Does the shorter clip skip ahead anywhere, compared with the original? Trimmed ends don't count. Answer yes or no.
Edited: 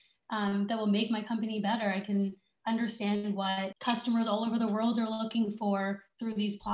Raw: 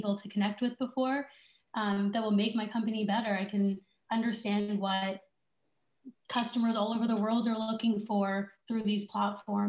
yes